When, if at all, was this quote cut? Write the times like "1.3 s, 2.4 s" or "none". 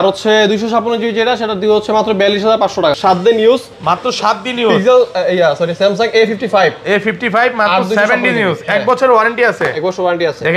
3.0 s